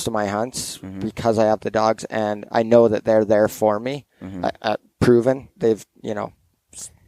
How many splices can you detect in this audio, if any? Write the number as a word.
zero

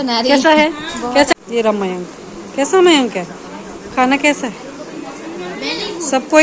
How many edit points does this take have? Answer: one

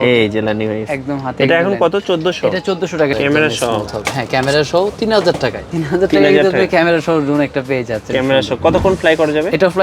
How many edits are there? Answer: two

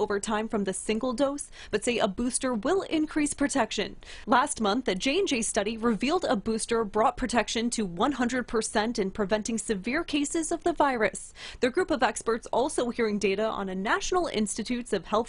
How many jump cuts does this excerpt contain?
zero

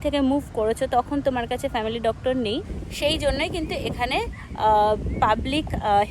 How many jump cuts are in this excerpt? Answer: one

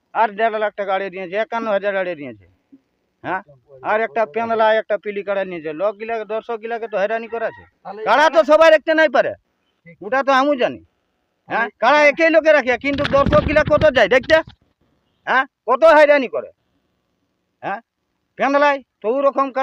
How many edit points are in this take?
zero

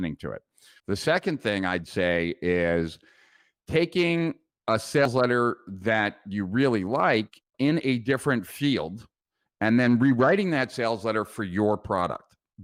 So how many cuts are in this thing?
zero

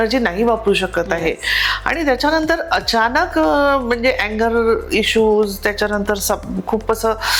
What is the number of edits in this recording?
zero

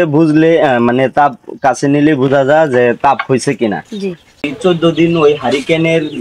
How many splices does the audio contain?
one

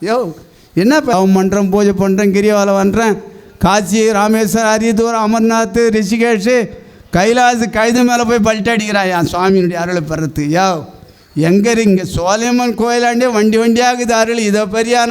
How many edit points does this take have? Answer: one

